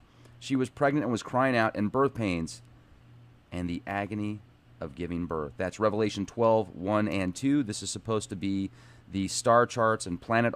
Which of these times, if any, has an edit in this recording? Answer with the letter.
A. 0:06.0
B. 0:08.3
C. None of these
A